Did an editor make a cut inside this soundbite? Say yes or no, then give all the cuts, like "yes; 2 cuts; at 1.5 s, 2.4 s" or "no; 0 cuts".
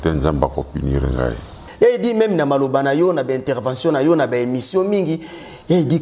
yes; 1 cut; at 1.6 s